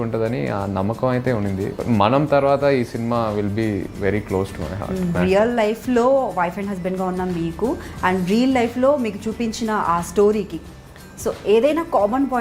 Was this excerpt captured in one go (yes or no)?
no